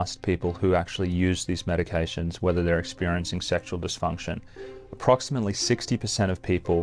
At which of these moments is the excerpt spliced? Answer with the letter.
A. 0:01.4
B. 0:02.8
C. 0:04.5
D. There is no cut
D